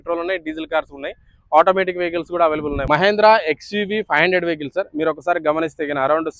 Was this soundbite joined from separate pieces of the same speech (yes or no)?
yes